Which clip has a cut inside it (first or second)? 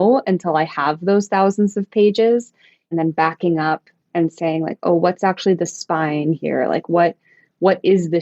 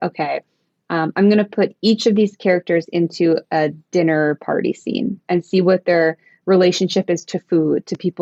first